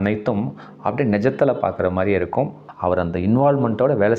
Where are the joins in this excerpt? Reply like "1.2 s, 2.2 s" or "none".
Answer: 2.6 s